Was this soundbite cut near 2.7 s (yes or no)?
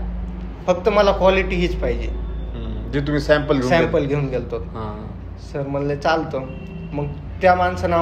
no